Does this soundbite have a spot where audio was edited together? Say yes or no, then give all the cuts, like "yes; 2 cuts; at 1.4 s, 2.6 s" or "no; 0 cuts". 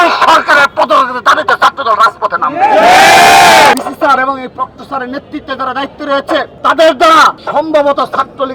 yes; 3 cuts; at 3.7 s, 6.5 s, 7.4 s